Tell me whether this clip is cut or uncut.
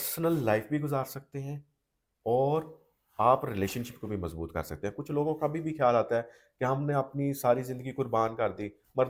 uncut